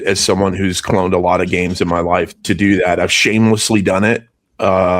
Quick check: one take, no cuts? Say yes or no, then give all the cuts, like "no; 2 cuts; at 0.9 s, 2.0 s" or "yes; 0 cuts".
no; 1 cut; at 2.3 s